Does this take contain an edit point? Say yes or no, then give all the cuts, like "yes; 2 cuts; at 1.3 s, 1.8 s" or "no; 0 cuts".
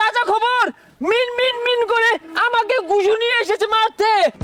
no; 0 cuts